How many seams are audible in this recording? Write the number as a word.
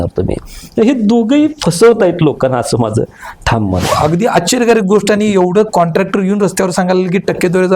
one